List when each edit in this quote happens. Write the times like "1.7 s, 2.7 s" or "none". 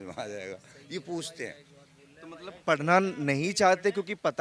none